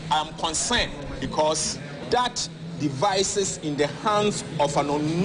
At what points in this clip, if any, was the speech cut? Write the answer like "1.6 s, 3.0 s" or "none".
1.1 s, 2.0 s